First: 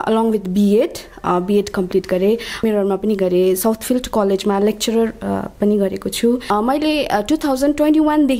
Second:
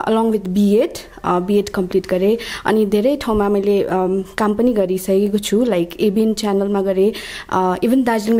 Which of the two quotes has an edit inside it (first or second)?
first